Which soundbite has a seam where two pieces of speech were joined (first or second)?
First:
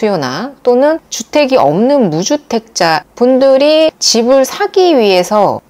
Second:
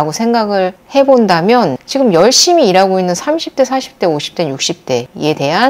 first